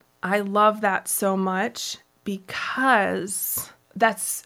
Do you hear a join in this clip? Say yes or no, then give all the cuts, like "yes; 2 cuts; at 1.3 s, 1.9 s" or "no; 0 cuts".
no; 0 cuts